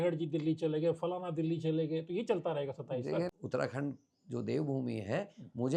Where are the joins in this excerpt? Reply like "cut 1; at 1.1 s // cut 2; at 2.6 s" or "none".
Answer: cut 1; at 3.3 s